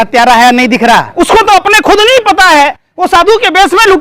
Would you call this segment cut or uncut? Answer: cut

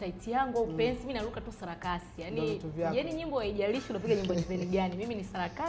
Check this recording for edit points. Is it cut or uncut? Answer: uncut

